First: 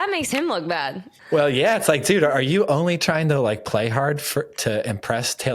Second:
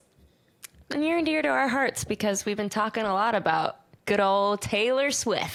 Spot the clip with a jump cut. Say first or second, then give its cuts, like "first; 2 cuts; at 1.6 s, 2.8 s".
first; 1 cut; at 1.1 s